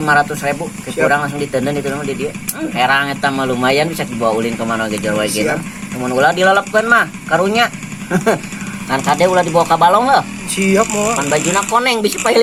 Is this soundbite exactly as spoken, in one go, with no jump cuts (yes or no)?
yes